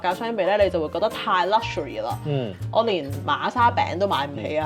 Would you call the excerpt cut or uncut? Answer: uncut